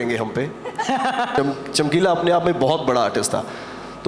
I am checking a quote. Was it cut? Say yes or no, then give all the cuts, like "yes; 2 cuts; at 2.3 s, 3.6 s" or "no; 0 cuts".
yes; 1 cut; at 1.3 s